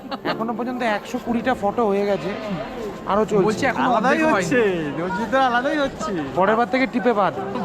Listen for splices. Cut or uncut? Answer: uncut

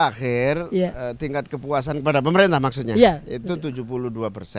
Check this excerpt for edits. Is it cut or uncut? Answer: uncut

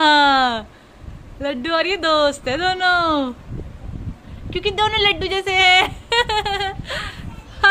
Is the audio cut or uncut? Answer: uncut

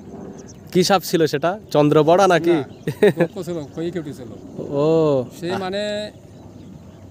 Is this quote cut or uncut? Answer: uncut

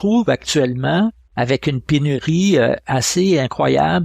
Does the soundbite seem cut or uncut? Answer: cut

